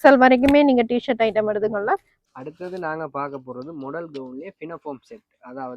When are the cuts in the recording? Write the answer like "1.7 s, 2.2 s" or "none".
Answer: 2.1 s